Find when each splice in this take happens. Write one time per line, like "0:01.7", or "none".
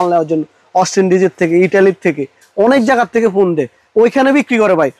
none